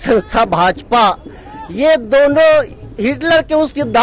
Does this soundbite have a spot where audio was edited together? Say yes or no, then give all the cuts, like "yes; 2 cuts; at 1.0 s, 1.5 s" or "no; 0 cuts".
no; 0 cuts